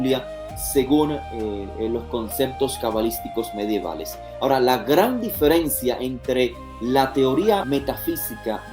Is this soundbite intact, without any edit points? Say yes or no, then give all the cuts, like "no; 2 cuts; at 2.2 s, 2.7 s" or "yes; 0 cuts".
no; 1 cut; at 7.6 s